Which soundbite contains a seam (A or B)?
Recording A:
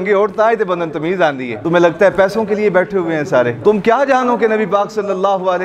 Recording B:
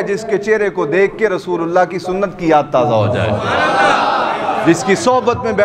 A